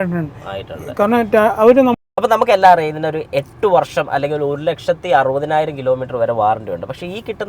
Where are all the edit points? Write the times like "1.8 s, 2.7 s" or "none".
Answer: 2.0 s